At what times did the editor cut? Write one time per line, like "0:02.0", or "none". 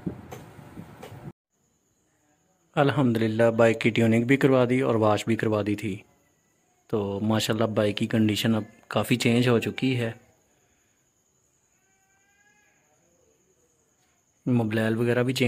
0:01.4